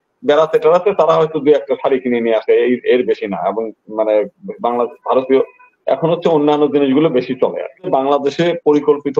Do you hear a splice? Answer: yes; 1 cut; at 7.9 s

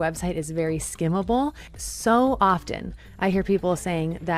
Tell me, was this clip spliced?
yes; 1 cut; at 1.7 s

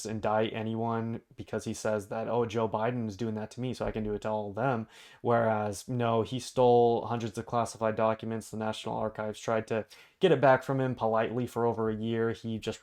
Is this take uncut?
yes; 0 cuts

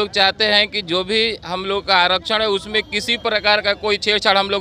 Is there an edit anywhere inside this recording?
no; 0 cuts

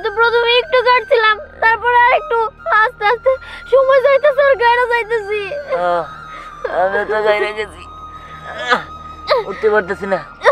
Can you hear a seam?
no; 0 cuts

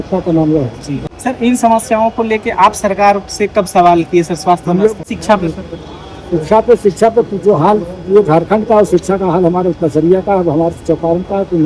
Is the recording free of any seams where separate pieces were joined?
no; 2 cuts; at 0.9 s, 5.1 s

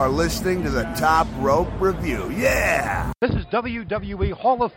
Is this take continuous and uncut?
no; 1 cut; at 3.1 s

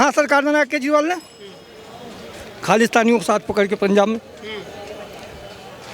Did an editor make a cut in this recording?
no; 0 cuts

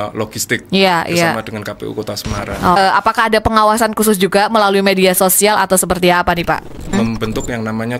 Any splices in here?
yes; 2 cuts; at 2.8 s, 6.9 s

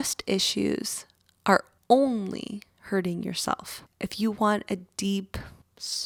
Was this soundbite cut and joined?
no; 0 cuts

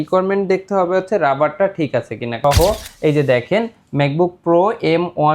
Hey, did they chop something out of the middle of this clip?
yes; 1 cut; at 2.4 s

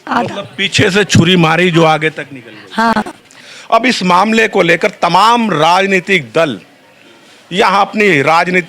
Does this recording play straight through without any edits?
no; 1 cut; at 2.9 s

